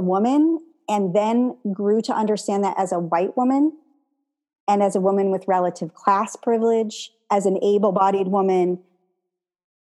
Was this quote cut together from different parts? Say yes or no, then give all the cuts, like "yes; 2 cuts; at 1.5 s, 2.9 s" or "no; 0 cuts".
yes; 1 cut; at 7.1 s